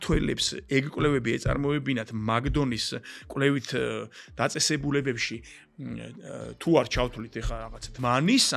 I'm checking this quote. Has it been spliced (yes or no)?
no